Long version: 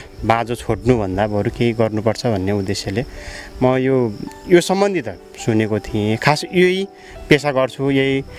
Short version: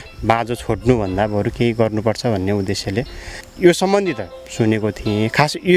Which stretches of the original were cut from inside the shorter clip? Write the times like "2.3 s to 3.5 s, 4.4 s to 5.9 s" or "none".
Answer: 3.4 s to 4.3 s